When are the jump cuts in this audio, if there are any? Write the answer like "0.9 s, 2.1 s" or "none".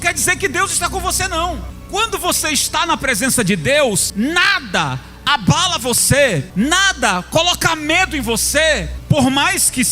1.7 s, 4.1 s, 6.5 s, 8.9 s